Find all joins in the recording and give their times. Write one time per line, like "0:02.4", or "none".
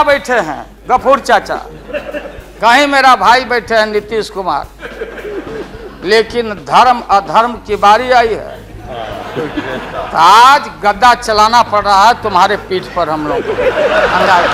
none